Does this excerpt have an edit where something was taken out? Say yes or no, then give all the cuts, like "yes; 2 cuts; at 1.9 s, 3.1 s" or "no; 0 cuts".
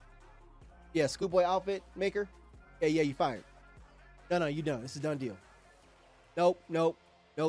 yes; 1 cut; at 1.1 s